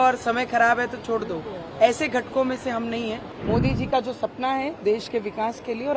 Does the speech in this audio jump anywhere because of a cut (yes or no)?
yes